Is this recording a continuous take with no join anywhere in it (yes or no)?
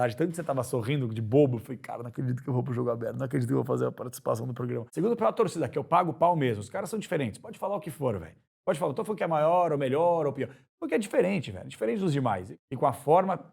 no